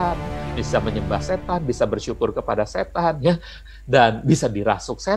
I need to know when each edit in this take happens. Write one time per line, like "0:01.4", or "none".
0:03.6